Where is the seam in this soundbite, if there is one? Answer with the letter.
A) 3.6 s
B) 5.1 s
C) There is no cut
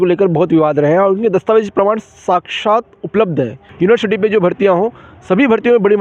A